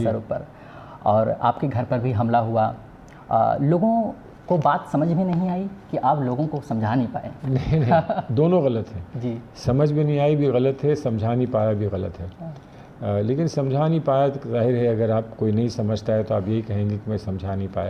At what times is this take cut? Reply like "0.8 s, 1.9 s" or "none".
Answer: none